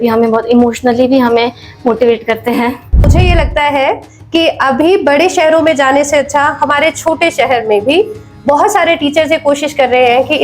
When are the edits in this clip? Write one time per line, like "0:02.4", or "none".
0:03.1